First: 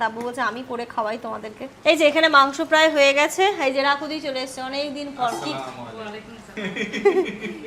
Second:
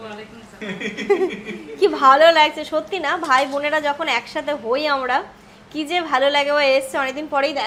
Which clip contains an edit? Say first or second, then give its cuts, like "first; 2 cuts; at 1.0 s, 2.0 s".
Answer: first; 1 cut; at 1.7 s